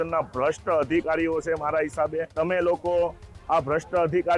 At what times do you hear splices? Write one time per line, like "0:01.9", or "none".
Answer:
0:02.3